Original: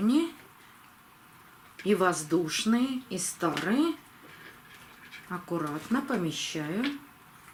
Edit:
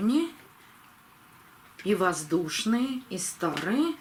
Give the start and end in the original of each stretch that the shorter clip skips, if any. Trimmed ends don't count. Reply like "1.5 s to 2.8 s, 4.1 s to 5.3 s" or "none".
none